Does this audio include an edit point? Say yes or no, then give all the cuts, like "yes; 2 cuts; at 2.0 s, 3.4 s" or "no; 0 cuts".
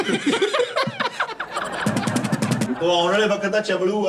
yes; 1 cut; at 2.7 s